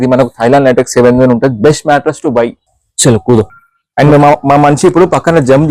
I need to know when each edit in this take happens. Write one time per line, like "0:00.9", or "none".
0:02.6